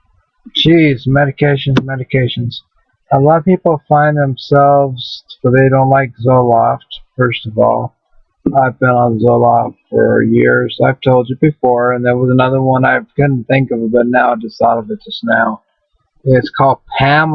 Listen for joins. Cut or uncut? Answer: cut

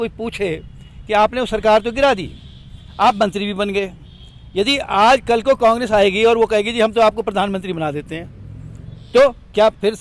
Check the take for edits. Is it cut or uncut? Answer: uncut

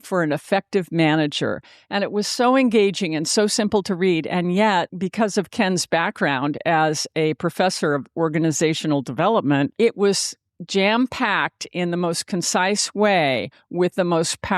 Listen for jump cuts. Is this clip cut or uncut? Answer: cut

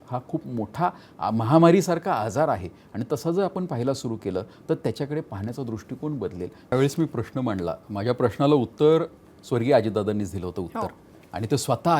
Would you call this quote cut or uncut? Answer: cut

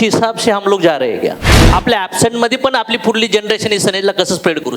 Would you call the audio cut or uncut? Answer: cut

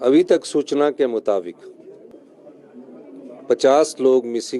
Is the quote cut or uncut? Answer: cut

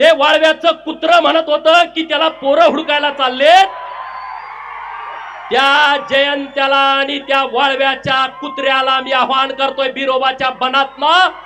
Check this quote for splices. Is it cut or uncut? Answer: uncut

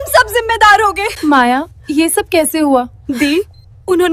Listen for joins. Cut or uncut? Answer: cut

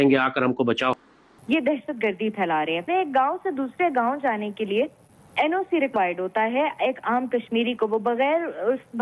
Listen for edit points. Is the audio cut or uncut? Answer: cut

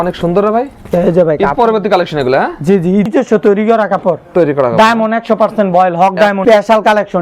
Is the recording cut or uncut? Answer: cut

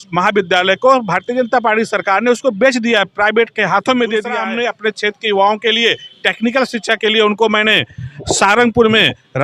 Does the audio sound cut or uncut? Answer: cut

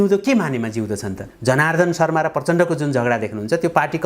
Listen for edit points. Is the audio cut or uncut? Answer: cut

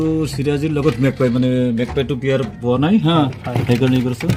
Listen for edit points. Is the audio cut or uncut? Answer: uncut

